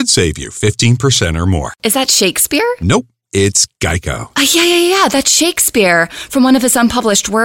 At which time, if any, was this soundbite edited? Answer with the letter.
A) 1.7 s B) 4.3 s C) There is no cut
A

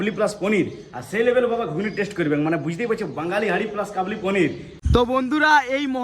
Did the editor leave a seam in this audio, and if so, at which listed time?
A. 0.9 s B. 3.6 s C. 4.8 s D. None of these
C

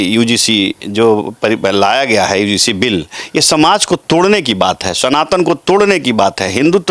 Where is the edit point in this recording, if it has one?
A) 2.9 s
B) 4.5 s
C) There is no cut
C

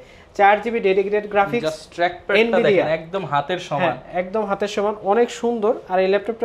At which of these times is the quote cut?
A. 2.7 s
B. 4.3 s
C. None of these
C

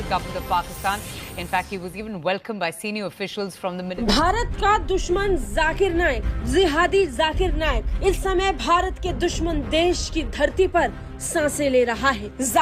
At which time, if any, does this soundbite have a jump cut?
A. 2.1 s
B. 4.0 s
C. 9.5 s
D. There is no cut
B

